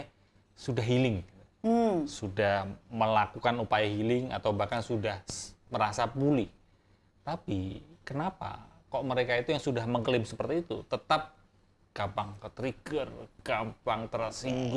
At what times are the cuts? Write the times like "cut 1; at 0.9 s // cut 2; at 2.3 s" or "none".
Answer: none